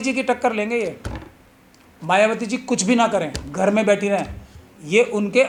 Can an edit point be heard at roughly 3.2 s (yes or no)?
no